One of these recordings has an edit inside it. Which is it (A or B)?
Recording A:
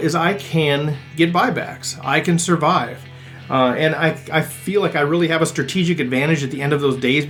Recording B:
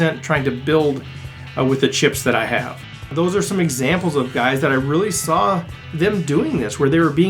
B